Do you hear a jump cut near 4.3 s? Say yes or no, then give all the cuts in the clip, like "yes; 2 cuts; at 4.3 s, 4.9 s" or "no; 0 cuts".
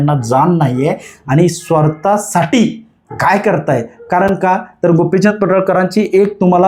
no; 0 cuts